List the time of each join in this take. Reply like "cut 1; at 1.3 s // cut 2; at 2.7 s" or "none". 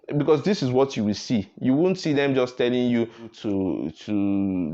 cut 1; at 3.4 s